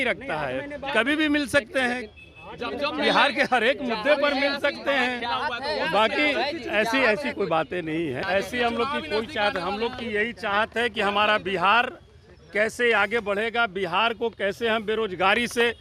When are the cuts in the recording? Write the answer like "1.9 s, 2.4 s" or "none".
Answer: 8.2 s